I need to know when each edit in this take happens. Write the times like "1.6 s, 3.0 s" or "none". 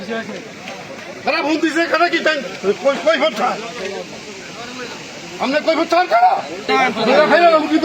6.6 s